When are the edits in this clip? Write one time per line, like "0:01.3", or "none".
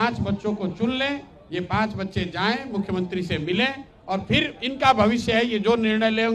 none